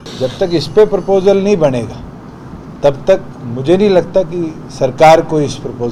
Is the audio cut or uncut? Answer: uncut